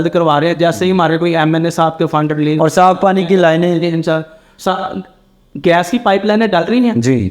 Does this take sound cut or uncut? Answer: uncut